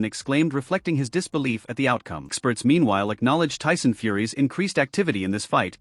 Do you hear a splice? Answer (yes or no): yes